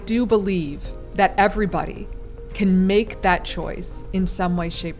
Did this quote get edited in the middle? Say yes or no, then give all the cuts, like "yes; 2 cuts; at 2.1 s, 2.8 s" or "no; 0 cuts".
no; 0 cuts